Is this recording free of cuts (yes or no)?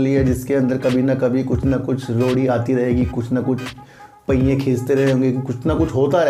yes